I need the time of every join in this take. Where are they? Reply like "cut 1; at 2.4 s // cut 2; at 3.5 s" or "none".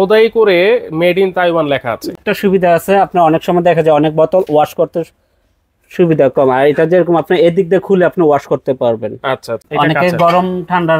cut 1; at 2.1 s // cut 2; at 9.6 s